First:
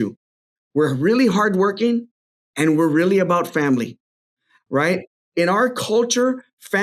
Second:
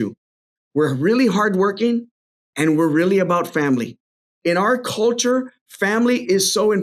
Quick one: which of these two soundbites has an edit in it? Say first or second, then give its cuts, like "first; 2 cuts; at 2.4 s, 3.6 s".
second; 1 cut; at 4.2 s